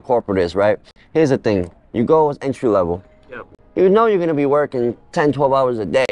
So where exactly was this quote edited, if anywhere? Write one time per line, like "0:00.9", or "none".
none